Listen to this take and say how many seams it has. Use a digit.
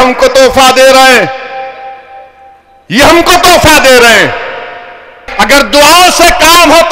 1